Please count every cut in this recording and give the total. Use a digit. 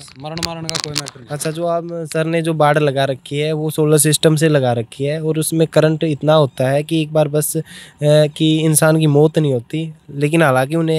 0